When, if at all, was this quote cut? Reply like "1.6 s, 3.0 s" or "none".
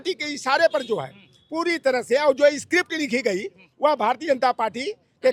none